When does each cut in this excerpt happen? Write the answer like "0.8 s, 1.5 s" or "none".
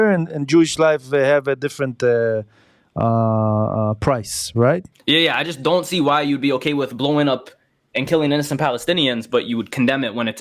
4.9 s